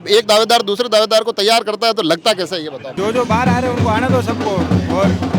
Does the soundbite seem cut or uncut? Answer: cut